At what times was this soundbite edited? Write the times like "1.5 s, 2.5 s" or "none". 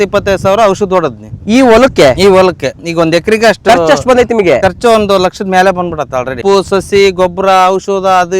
6.4 s